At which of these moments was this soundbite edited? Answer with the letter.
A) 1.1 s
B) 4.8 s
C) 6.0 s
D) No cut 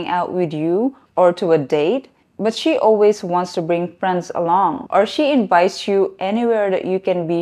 D